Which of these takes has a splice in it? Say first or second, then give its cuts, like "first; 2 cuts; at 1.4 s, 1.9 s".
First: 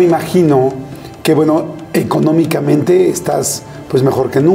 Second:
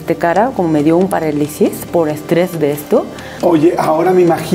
second; 1 cut; at 3.2 s